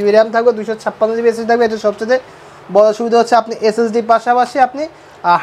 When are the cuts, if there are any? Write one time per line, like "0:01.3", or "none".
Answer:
none